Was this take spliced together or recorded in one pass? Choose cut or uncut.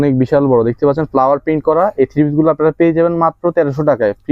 uncut